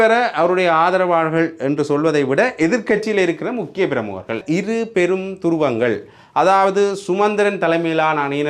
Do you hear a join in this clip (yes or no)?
yes